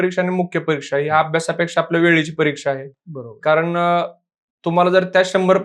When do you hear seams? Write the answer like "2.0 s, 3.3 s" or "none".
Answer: none